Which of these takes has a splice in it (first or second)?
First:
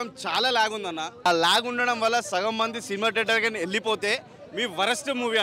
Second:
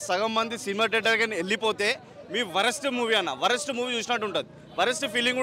first